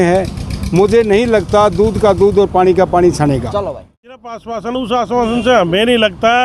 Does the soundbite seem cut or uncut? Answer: cut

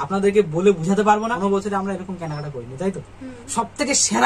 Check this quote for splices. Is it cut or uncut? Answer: cut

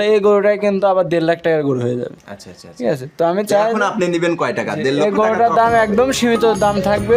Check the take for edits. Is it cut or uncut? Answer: uncut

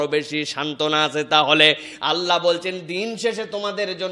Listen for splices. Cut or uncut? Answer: uncut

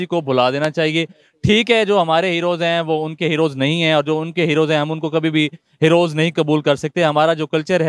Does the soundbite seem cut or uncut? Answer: uncut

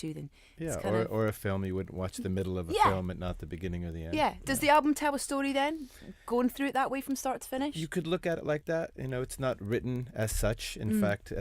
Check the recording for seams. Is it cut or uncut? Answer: cut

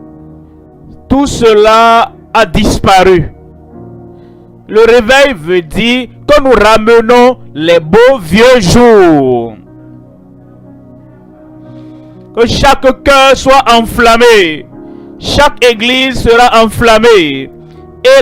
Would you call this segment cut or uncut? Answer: cut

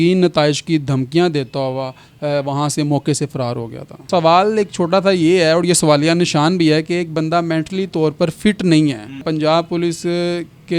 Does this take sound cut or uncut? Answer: cut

